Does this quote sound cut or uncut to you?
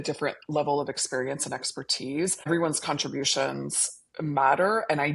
cut